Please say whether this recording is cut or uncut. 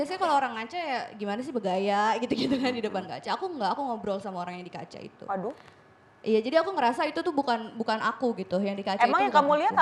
uncut